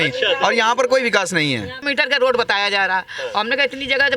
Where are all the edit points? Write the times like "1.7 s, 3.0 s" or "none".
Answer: 1.8 s